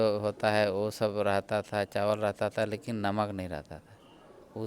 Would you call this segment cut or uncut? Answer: uncut